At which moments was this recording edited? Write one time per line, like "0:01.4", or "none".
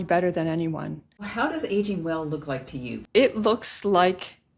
0:01.3
0:03.0